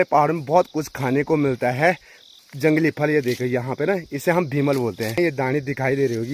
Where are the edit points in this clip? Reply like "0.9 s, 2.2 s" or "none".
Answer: 5.2 s